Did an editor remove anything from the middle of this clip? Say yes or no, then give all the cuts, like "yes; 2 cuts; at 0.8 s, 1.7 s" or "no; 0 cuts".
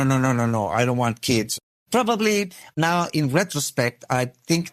no; 0 cuts